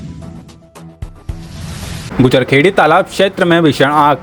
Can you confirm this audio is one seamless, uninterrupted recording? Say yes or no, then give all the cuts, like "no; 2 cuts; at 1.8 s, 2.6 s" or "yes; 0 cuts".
no; 1 cut; at 2.1 s